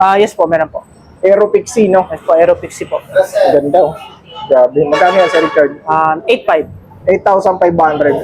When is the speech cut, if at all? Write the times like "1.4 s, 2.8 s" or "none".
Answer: none

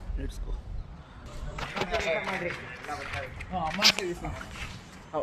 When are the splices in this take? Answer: 1.2 s

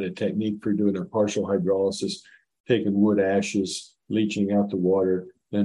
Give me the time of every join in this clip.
none

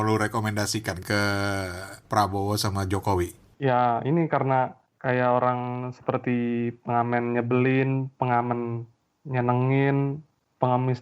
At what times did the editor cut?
1.0 s, 2.0 s, 3.4 s, 4.9 s

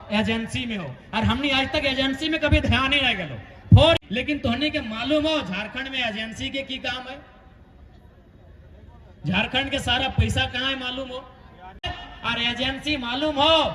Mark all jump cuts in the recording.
4.0 s, 12.0 s

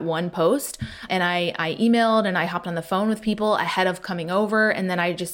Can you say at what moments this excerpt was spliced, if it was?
1.0 s

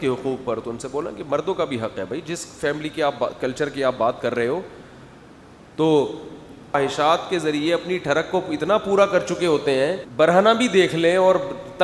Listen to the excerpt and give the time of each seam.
6.8 s, 10.0 s

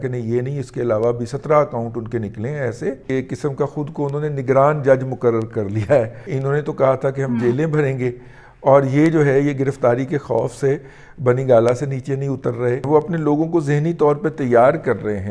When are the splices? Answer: 3.0 s, 6.3 s, 12.9 s

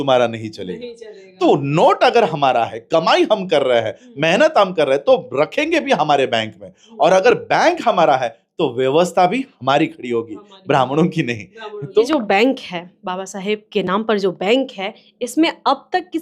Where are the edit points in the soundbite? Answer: 12.0 s

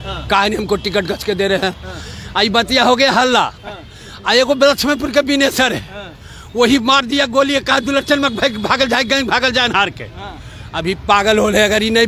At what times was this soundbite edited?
none

